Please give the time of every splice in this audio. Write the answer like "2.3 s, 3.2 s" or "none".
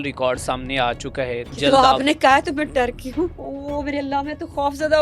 1.6 s, 3.5 s